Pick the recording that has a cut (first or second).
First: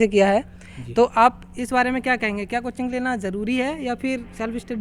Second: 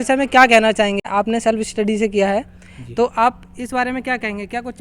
second